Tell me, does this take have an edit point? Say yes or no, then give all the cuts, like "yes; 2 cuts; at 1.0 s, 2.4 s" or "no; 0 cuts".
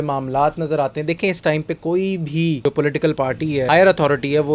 yes; 2 cuts; at 2.6 s, 3.7 s